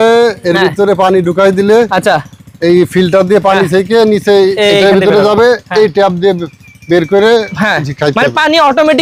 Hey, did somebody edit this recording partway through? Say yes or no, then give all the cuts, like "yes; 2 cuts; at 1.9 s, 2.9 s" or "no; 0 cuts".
no; 0 cuts